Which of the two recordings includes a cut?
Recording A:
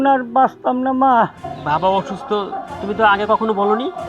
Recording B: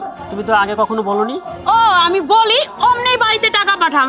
A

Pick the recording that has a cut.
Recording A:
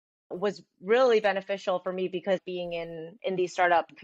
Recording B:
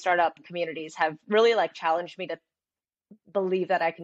A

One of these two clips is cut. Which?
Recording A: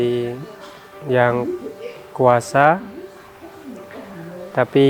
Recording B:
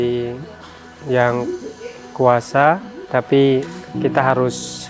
B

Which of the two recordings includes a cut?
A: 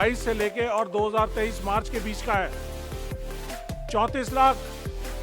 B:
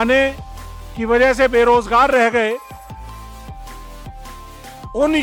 A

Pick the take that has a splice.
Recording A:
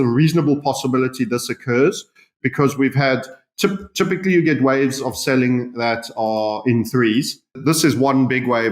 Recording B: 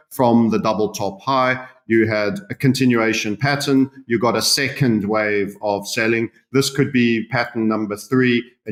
A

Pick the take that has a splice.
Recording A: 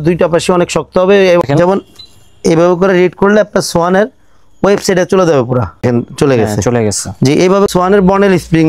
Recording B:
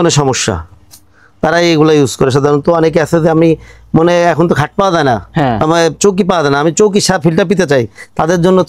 A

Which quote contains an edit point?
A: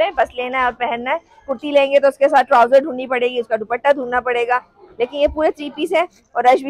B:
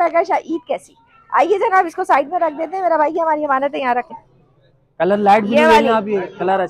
B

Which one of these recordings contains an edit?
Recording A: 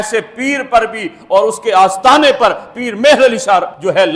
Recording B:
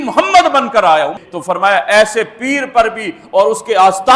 B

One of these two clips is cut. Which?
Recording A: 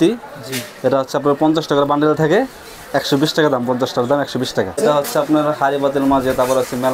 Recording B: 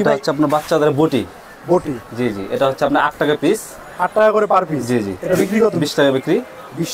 A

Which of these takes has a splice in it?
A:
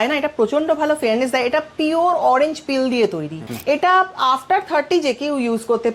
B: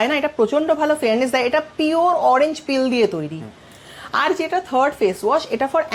A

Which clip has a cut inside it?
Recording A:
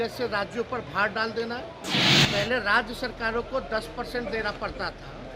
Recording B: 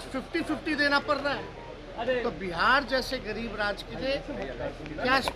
A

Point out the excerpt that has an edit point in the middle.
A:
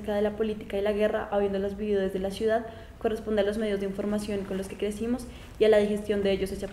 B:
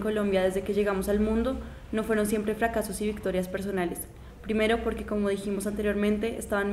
A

